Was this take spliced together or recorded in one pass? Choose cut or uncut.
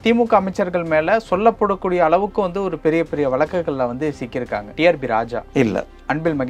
cut